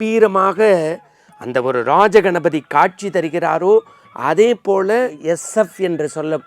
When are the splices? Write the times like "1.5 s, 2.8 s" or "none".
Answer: 5.2 s